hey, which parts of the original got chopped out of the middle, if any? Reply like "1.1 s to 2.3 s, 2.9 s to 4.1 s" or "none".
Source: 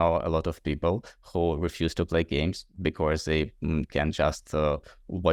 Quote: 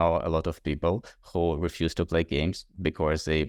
none